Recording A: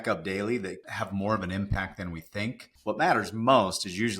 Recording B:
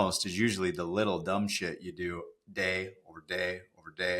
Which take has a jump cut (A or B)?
A